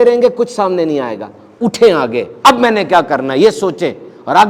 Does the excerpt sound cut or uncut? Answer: uncut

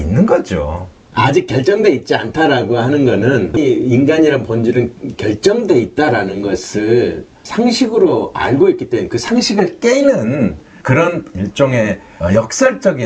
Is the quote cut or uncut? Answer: cut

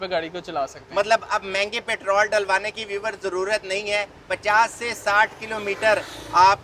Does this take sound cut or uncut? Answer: uncut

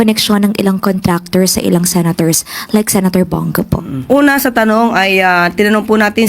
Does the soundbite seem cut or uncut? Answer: cut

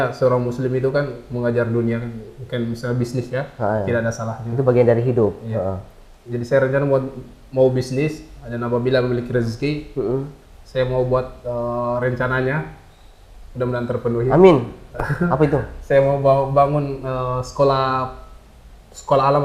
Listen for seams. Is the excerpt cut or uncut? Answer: uncut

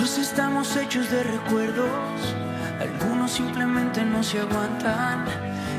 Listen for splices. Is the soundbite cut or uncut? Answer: uncut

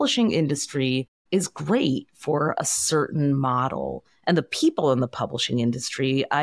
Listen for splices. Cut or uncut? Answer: cut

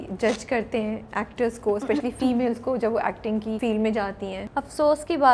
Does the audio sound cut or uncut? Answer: cut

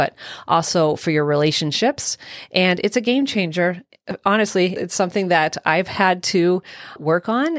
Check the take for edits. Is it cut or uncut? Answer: uncut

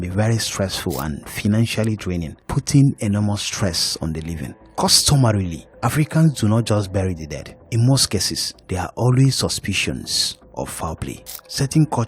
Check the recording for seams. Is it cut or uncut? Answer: cut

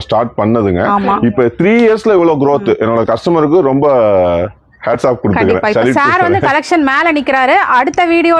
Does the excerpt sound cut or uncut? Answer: uncut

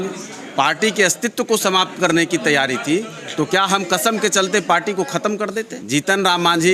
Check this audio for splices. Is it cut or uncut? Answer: cut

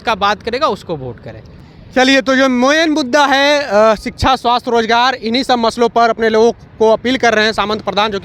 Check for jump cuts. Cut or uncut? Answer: uncut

